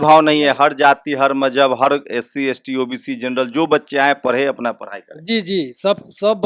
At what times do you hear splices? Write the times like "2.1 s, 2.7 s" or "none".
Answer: none